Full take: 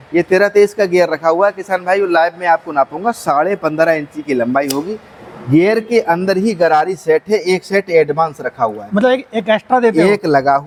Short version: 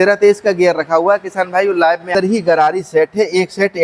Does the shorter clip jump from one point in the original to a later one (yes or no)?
yes